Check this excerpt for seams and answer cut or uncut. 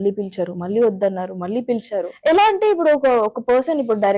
cut